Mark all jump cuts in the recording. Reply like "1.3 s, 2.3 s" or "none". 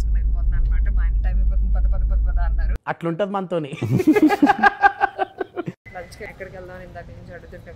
5.8 s